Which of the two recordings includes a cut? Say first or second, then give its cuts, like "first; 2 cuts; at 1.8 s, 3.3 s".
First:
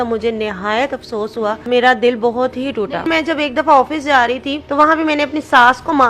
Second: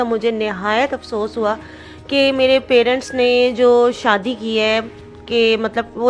first; 3 cuts; at 1.7 s, 3.1 s, 4.6 s